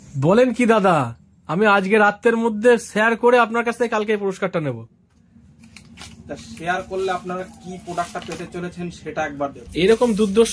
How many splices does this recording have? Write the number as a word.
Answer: one